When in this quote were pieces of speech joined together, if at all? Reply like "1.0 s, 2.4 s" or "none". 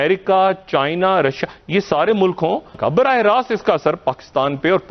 2.7 s